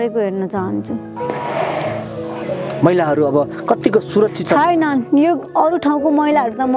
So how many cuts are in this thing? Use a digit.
1